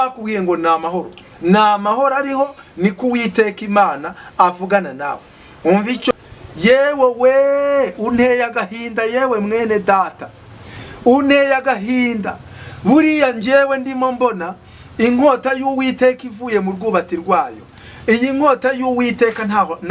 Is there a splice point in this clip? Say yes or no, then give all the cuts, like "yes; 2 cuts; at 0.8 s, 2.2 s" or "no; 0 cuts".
yes; 1 cut; at 6.1 s